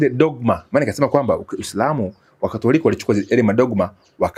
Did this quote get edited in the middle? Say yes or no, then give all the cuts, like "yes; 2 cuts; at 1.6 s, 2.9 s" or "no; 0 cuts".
no; 0 cuts